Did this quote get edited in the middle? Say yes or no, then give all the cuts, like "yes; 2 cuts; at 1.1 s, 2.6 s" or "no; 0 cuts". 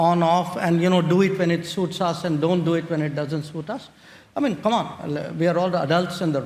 no; 0 cuts